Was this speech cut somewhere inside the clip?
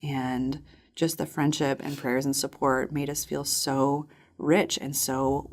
no; 0 cuts

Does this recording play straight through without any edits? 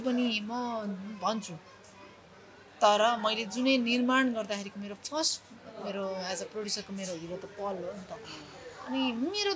yes; 0 cuts

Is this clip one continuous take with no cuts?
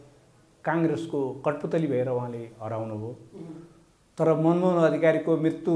yes; 0 cuts

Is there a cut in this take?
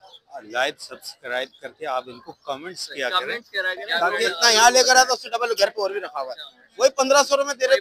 yes; 1 cut; at 4.3 s

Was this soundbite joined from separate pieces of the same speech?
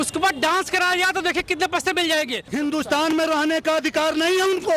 yes; 1 cut; at 2.4 s

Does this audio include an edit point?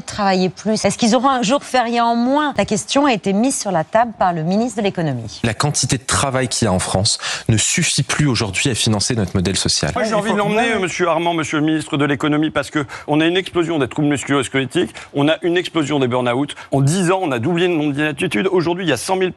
yes; 6 cuts; at 0.8 s, 2.5 s, 5.4 s, 10.0 s, 13.0 s, 16.7 s

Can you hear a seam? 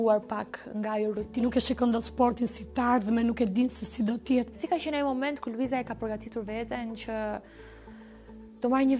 yes; 2 cuts; at 1.3 s, 4.6 s

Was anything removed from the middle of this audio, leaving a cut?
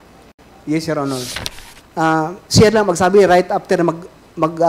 yes; 1 cut; at 1.3 s

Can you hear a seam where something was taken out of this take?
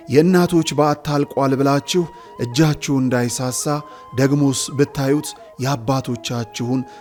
no; 0 cuts

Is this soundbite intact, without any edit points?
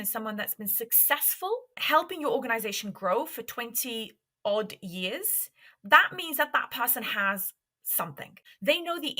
no; 2 cuts; at 1.8 s, 8.4 s

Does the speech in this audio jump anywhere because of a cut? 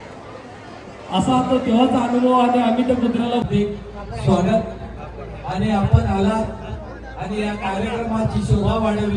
yes; 1 cut; at 3.5 s

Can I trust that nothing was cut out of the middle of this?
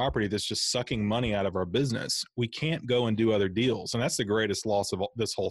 yes; 0 cuts

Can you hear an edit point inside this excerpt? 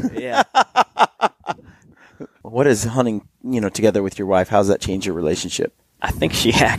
yes; 2 cuts; at 2.4 s, 5.9 s

